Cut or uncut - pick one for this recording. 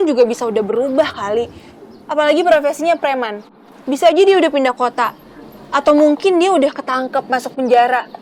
uncut